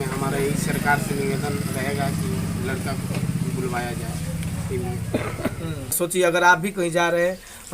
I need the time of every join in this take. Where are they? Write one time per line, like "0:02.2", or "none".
0:05.9